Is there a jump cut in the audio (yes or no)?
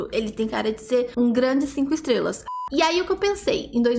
yes